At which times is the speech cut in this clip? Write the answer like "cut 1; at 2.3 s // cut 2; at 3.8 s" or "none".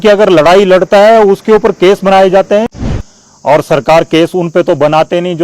cut 1; at 2.8 s